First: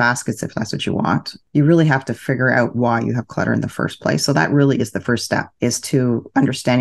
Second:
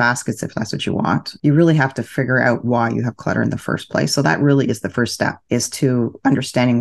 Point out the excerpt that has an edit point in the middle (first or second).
second